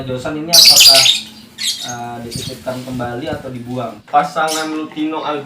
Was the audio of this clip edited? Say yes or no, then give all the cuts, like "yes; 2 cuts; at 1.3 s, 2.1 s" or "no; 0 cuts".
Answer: yes; 1 cut; at 4.0 s